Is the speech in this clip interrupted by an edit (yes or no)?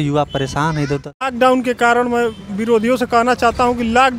yes